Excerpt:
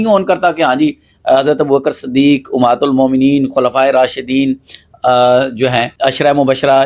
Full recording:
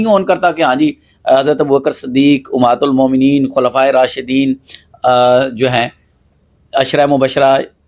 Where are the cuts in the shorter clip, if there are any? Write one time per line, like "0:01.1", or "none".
0:05.9